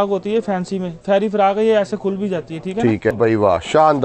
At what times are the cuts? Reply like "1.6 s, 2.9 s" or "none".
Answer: 3.1 s